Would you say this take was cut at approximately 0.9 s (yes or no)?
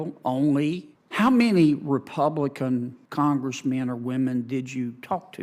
yes